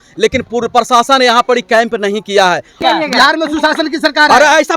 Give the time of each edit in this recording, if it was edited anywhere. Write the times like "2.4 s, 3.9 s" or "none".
2.8 s

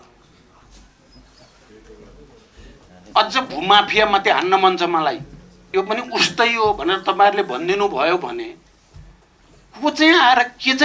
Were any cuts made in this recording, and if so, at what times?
5.7 s

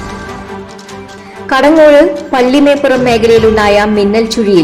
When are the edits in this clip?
1.1 s

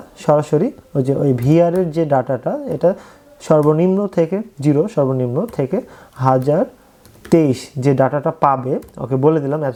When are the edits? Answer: none

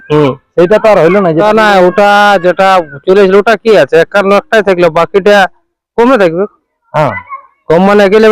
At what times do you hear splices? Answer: 1.4 s

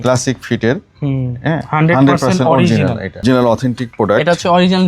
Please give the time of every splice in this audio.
3.2 s

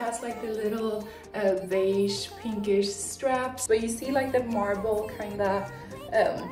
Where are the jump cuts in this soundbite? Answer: 3.6 s

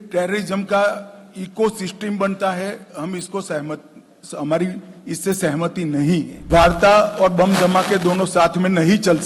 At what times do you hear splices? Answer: 6.4 s

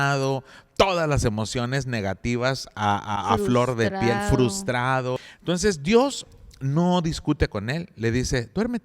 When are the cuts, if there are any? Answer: 5.3 s

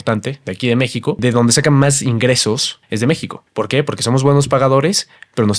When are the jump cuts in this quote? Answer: 1.2 s, 2.8 s

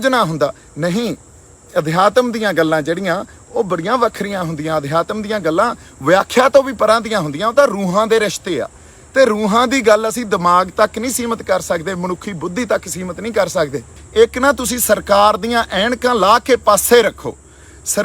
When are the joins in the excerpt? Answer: 13.9 s

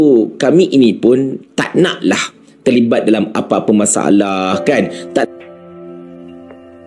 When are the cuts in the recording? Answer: 5.2 s

